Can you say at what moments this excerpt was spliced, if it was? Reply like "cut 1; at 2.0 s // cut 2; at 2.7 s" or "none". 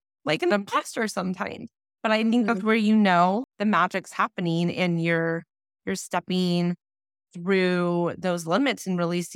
cut 1; at 3.5 s